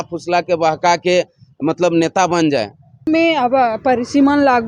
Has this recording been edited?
yes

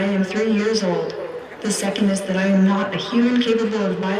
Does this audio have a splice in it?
no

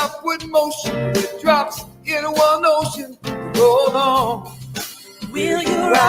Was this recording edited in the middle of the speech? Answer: yes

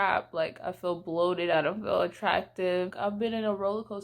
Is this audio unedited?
no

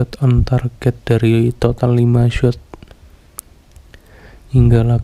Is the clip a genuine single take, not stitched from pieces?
yes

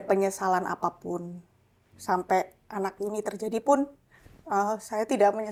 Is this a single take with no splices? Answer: yes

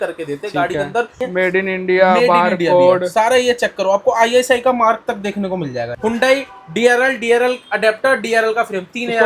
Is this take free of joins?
no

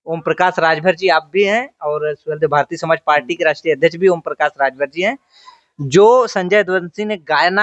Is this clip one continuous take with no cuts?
yes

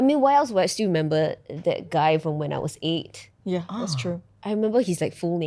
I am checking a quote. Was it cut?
no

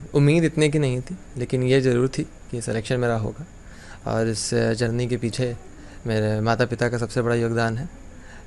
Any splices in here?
no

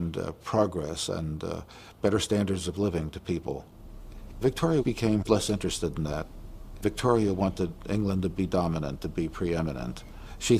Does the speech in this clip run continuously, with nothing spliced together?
no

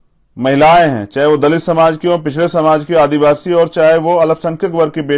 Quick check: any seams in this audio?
no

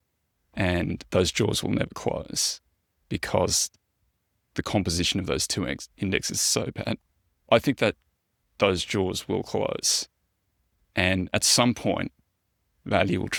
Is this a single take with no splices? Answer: yes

